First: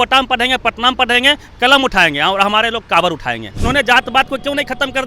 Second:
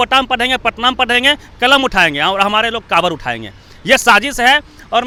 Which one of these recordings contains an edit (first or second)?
first